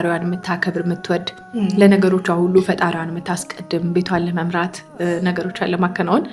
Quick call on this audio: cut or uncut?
uncut